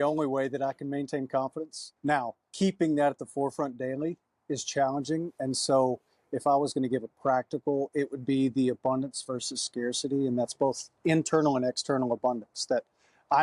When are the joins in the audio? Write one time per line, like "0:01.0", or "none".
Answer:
0:02.4

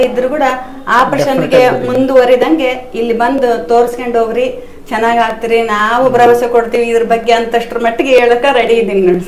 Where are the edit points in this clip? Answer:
none

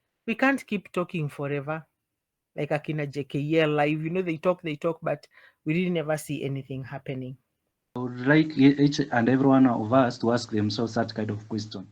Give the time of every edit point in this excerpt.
0:08.0

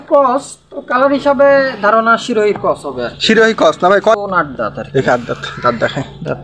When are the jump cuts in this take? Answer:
0:04.2

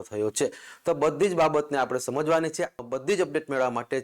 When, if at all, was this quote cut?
0:02.8

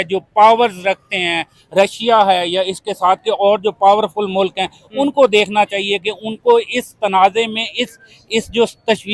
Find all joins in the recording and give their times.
none

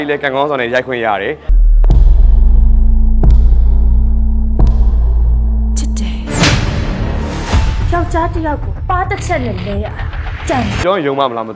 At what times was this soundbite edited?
0:01.5
0:10.8

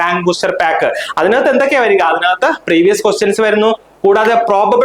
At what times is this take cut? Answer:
none

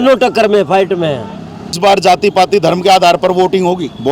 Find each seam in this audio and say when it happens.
0:01.8

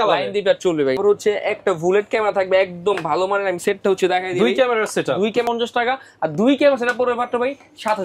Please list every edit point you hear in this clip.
0:01.0
0:05.5

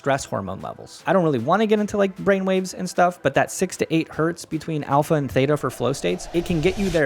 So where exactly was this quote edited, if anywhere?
0:00.9
0:06.2

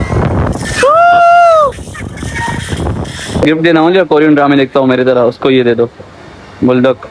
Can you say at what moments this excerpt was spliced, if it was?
0:03.4

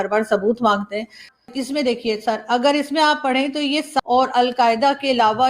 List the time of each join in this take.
0:01.3
0:03.9

